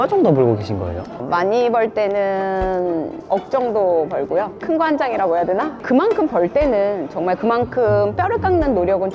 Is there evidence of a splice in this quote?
yes; 1 cut; at 5.7 s

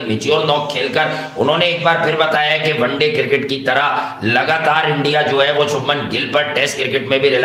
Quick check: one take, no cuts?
yes; 0 cuts

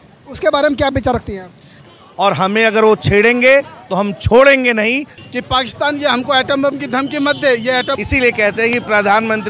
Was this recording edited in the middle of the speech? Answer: yes; 3 cuts; at 1.9 s, 5.1 s, 7.9 s

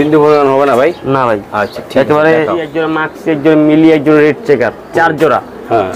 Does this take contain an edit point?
yes; 1 cut; at 2.8 s

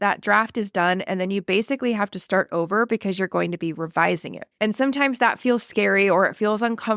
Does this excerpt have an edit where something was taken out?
yes; 1 cut; at 4.4 s

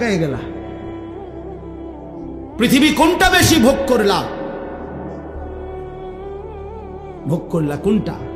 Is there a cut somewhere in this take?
no; 0 cuts

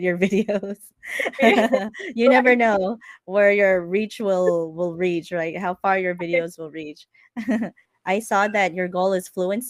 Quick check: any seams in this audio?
yes; 1 cut; at 7.5 s

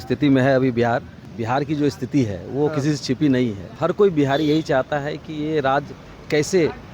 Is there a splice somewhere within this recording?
yes; 2 cuts; at 1.2 s, 3.7 s

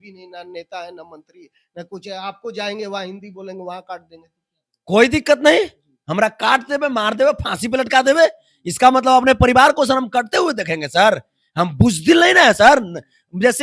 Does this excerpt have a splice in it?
no; 0 cuts

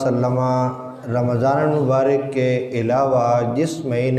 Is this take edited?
no; 0 cuts

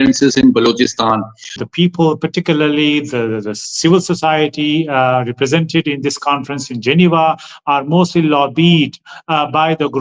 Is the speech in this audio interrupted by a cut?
yes; 1 cut; at 1.6 s

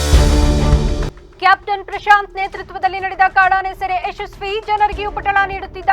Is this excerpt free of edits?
no; 1 cut; at 1.1 s

